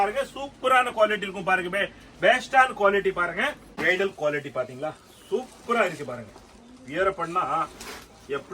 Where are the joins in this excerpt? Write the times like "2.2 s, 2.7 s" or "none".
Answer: 3.7 s